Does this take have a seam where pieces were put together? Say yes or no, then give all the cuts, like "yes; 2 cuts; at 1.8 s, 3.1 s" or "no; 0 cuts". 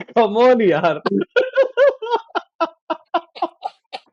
no; 0 cuts